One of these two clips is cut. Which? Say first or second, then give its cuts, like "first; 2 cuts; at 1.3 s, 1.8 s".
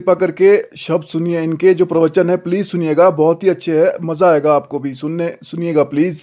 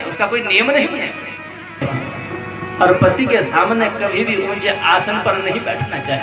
second; 1 cut; at 1.8 s